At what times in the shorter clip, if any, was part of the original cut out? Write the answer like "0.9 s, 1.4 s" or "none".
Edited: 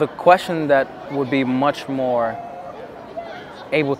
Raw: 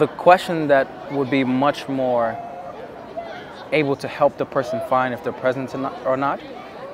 none